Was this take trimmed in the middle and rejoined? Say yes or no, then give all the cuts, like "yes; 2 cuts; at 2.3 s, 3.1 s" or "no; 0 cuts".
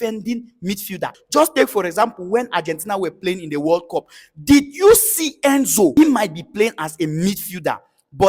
yes; 2 cuts; at 1.1 s, 5.9 s